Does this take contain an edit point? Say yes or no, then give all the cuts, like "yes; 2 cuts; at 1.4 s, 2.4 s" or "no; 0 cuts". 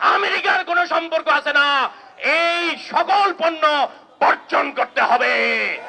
no; 0 cuts